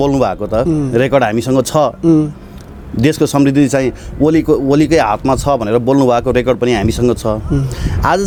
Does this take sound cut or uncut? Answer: uncut